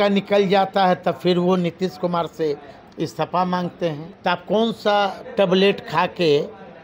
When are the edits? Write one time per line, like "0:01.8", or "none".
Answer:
0:04.1